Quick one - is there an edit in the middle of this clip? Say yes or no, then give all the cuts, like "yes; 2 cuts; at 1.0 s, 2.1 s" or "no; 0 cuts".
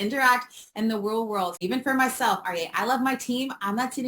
yes; 1 cut; at 1.6 s